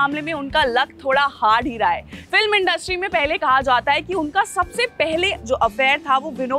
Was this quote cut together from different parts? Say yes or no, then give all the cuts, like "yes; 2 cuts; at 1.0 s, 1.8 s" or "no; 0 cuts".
no; 0 cuts